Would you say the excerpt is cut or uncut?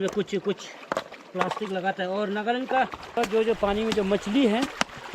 cut